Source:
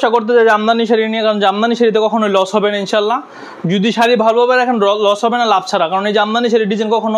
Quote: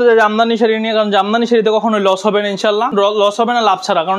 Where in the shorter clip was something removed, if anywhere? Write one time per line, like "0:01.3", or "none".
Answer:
0:02.9